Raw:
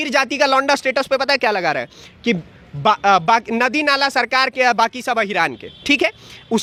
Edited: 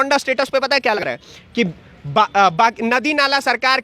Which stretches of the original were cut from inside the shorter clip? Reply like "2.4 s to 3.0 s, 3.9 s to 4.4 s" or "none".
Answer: 1.6 s to 1.7 s